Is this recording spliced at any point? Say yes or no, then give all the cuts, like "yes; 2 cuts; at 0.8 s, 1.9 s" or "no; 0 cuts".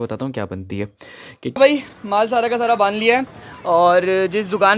yes; 1 cut; at 1.5 s